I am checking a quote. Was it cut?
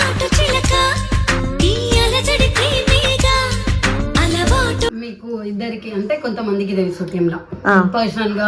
yes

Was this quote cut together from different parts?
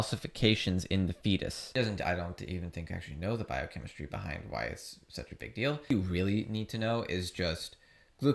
yes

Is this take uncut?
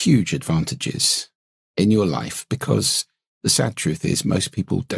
yes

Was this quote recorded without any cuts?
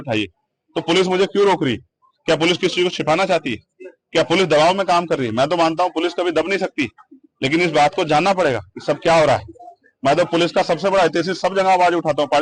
yes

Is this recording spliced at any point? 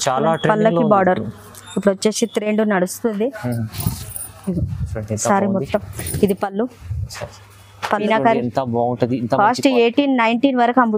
yes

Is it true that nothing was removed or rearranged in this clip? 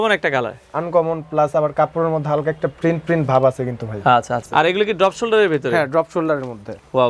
no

